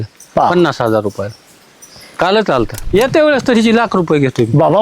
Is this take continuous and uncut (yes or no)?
no